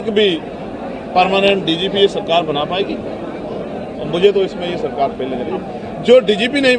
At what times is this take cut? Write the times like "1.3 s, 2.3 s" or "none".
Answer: none